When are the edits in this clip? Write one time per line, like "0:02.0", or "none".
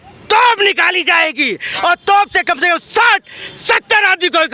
none